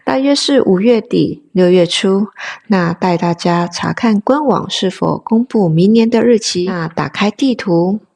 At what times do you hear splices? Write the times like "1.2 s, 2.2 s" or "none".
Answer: 6.8 s